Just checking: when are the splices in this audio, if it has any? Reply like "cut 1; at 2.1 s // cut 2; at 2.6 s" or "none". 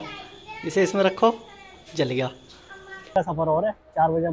cut 1; at 3.2 s